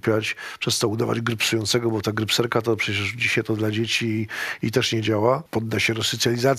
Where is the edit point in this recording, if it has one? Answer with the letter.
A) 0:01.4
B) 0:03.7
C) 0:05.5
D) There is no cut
C